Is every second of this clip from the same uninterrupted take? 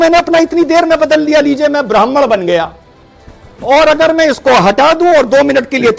yes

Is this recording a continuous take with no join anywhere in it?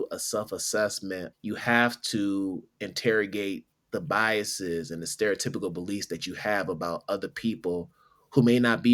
no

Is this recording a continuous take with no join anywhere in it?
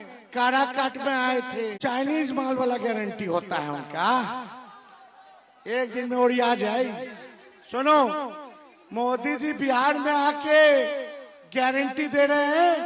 no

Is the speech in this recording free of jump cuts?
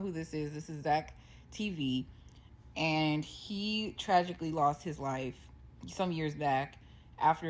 yes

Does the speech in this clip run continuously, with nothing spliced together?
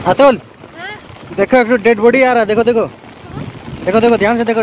yes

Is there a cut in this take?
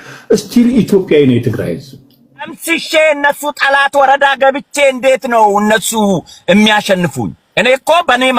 yes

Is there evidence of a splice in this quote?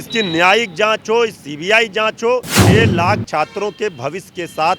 yes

